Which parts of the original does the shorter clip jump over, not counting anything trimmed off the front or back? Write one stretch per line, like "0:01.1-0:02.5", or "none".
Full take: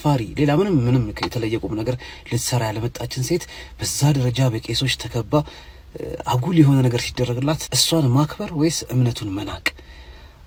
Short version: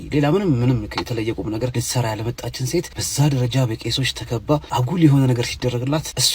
0:02.0-0:02.3
0:03.6-0:03.8
0:05.5-0:06.2